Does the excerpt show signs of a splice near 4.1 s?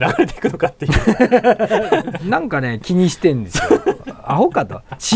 no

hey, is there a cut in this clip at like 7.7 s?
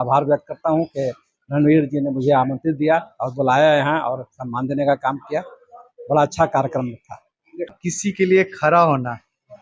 yes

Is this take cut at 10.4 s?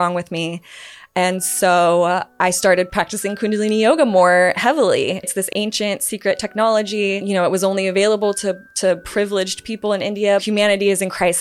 yes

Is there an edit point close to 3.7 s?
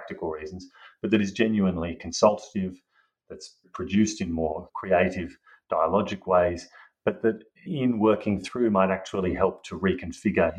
yes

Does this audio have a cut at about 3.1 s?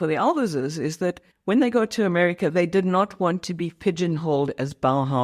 no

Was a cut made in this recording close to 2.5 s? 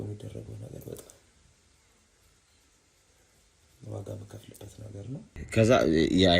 no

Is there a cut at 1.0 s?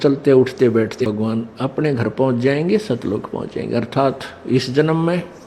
yes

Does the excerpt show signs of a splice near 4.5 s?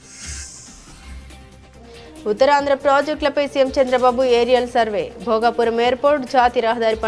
no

